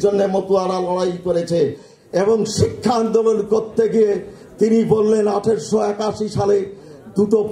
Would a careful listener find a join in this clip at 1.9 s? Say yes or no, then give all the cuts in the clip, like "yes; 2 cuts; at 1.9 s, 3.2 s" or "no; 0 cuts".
yes; 1 cut; at 1.9 s